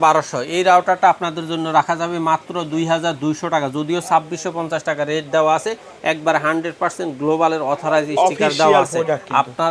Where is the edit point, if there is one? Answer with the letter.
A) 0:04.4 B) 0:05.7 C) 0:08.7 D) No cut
D